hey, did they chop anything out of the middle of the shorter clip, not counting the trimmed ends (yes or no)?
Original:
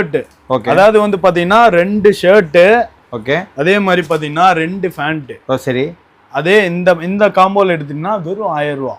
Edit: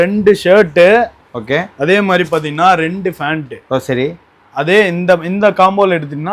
no